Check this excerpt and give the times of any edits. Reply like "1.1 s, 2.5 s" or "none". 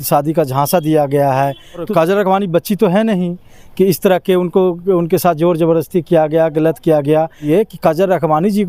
1.9 s, 7.4 s